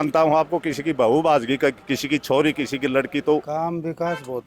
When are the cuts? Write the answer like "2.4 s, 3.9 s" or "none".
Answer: 3.5 s